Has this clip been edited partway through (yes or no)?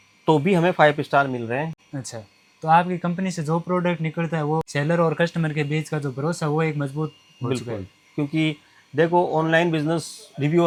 no